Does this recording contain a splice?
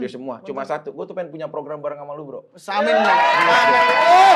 no; 0 cuts

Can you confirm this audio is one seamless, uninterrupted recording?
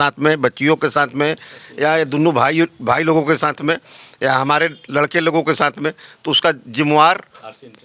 yes; 0 cuts

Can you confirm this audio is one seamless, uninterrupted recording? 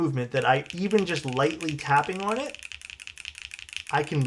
yes; 0 cuts

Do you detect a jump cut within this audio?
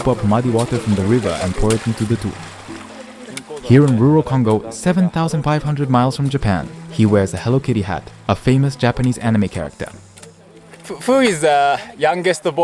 no; 0 cuts

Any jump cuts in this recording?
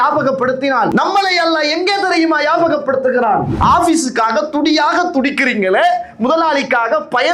yes; 2 cuts; at 0.9 s, 3.5 s

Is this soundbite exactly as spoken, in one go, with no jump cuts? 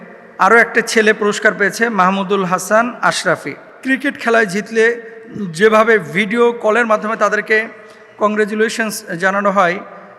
no; 1 cut; at 3.6 s

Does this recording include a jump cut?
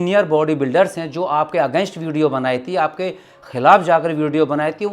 no; 0 cuts

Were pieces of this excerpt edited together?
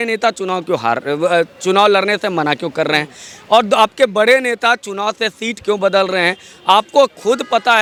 no; 0 cuts

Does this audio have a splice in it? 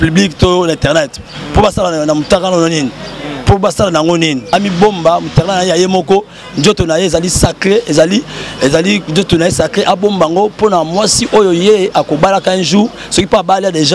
yes; 1 cut; at 4.5 s

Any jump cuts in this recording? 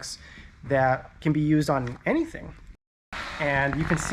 yes; 1 cut; at 2.8 s

